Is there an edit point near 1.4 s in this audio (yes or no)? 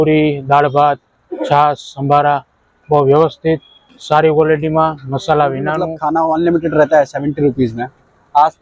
no